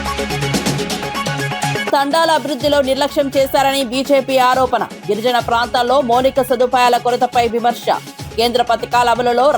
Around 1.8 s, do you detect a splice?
yes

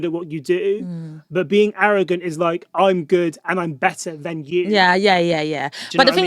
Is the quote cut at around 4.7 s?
no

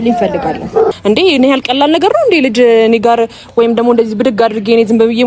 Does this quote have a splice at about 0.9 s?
yes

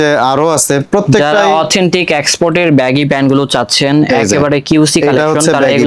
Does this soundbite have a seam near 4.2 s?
no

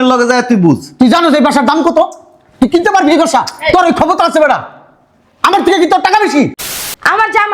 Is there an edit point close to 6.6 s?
yes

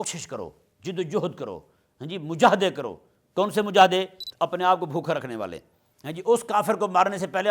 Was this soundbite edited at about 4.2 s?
yes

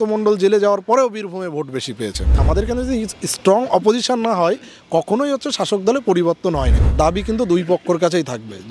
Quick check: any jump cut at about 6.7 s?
yes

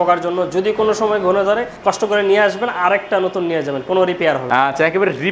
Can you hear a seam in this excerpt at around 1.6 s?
no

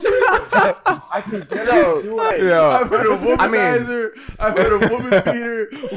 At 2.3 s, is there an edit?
yes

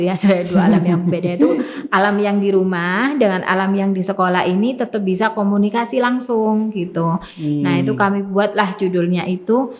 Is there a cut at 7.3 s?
no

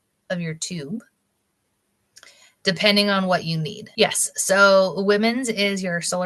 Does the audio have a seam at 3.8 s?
yes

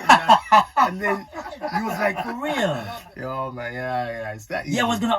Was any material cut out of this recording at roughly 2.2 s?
yes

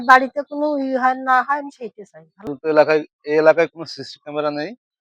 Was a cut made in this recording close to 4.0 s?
no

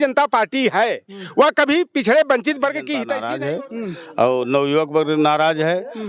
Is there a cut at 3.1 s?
yes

